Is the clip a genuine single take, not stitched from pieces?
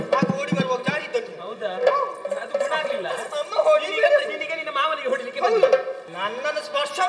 no; 1 cut; at 6.0 s

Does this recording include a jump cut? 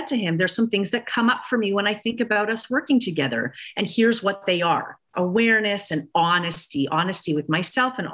yes; 1 cut; at 5.1 s

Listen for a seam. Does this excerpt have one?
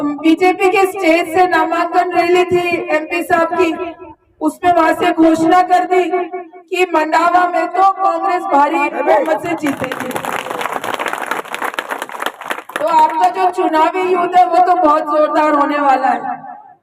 no; 0 cuts

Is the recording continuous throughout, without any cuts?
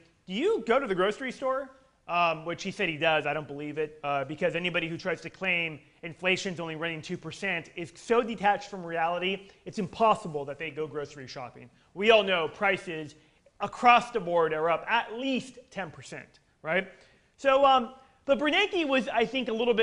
yes; 0 cuts

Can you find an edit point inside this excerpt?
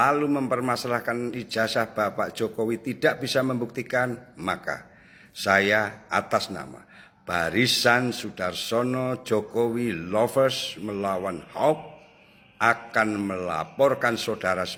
no; 0 cuts

